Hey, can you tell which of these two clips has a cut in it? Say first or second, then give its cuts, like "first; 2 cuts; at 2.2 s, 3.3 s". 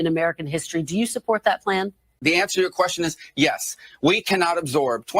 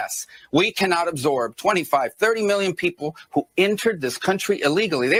first; 1 cut; at 2.1 s